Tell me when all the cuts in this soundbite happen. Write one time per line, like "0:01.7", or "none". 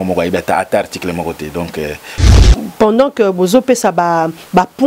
0:02.4